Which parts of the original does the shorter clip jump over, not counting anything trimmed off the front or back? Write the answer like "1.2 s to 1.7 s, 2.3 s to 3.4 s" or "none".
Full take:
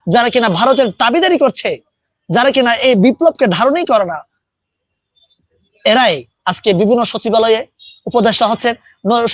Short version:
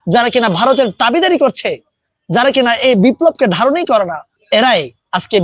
4.3 s to 5.6 s